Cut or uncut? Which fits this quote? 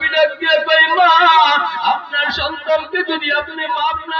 uncut